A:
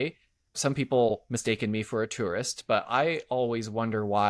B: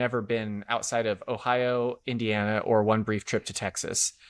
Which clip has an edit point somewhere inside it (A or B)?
A